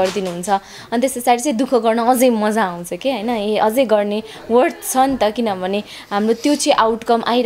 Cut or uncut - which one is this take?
uncut